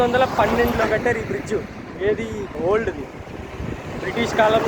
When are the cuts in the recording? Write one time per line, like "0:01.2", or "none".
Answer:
0:02.6